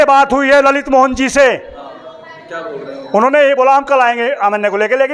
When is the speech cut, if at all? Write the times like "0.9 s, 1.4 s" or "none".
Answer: none